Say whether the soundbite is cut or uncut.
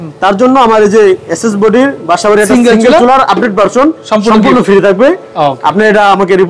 uncut